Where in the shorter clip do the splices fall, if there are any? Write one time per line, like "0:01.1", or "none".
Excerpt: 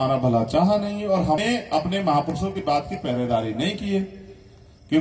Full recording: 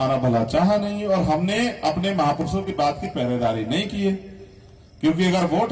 0:01.4